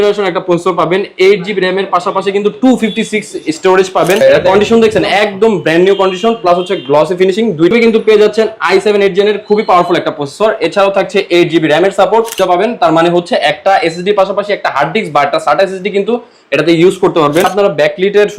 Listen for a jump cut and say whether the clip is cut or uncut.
cut